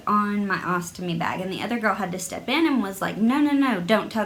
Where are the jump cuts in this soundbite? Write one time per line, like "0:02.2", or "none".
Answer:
none